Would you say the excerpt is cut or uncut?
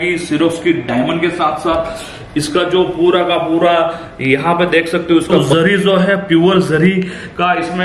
cut